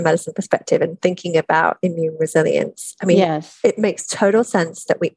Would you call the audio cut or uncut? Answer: uncut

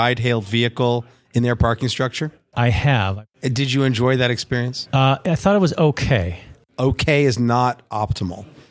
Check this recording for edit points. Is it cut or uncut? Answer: cut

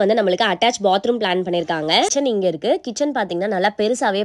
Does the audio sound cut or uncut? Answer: cut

